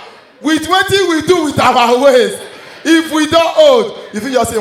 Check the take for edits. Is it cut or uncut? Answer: uncut